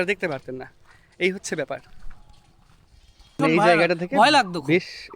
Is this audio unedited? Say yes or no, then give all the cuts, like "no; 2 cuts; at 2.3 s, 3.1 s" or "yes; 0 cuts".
no; 1 cut; at 3.4 s